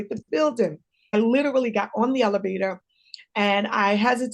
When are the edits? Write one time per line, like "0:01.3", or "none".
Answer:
0:01.1